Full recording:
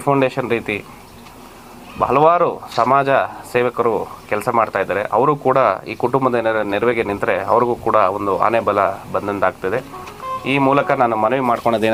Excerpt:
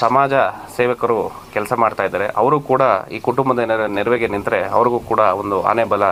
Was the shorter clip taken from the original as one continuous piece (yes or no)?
yes